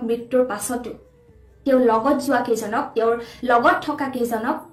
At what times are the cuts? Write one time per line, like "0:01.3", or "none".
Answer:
none